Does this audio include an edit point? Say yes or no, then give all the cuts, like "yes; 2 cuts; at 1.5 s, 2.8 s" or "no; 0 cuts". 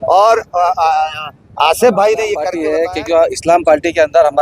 yes; 1 cut; at 2.5 s